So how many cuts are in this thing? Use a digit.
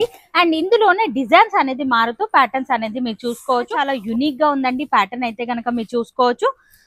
1